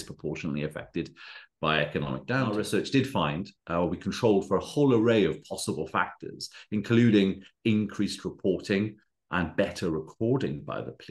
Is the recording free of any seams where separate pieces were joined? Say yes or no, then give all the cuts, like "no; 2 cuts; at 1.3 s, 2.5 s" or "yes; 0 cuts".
no; 1 cut; at 2.5 s